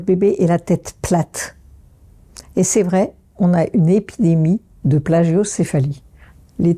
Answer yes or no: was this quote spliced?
no